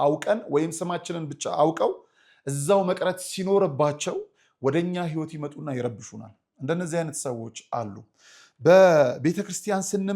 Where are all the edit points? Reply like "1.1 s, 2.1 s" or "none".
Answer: none